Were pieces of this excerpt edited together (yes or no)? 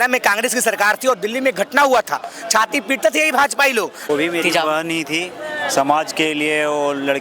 yes